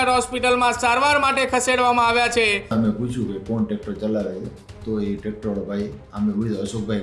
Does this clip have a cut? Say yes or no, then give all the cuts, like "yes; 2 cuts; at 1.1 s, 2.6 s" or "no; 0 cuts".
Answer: yes; 1 cut; at 2.7 s